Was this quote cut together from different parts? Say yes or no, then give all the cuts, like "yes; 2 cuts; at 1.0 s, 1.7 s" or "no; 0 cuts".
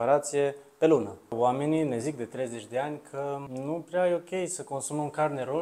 yes; 2 cuts; at 1.3 s, 3.5 s